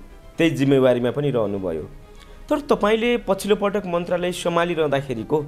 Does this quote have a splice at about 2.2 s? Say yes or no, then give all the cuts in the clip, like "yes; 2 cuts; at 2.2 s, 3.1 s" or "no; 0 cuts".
no; 0 cuts